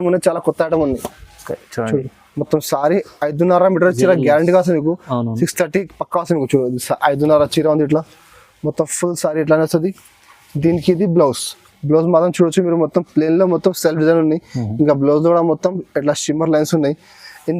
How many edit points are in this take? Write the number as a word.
zero